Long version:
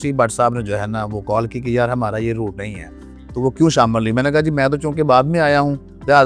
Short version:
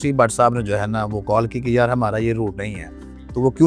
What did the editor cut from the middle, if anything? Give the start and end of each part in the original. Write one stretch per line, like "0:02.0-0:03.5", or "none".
none